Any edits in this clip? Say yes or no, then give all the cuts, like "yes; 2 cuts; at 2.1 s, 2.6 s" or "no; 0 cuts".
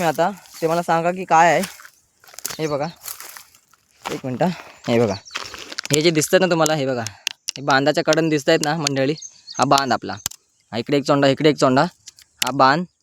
no; 0 cuts